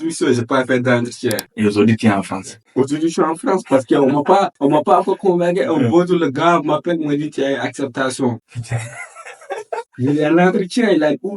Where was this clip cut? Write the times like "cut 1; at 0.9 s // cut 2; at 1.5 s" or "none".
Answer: cut 1; at 1.4 s